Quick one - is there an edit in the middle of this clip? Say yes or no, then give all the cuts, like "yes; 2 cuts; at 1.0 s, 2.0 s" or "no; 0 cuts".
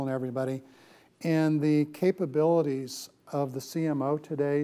no; 0 cuts